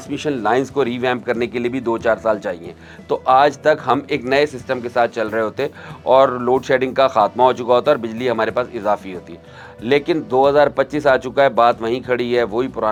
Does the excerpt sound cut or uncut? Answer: uncut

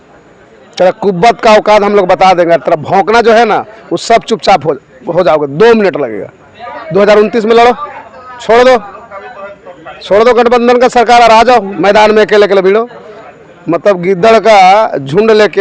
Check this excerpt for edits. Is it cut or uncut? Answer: uncut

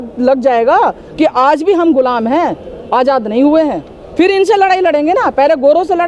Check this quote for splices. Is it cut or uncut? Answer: uncut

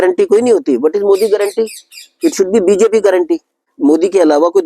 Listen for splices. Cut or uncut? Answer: cut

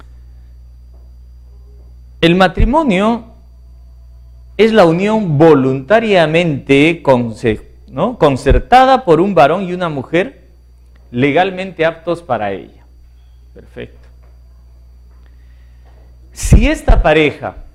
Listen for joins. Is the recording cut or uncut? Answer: uncut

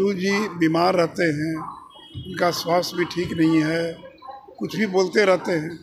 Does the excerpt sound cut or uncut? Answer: uncut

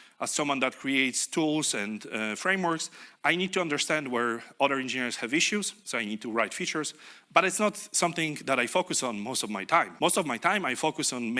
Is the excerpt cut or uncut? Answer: cut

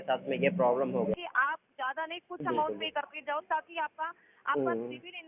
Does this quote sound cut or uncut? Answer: cut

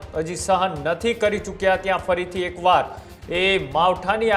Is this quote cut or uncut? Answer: uncut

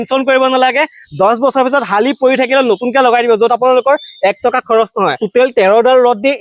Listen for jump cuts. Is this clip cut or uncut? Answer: cut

